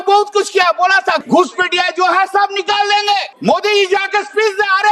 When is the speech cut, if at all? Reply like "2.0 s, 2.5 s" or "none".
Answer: 1.2 s, 3.3 s